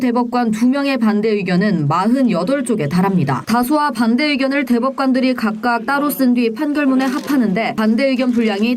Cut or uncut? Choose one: cut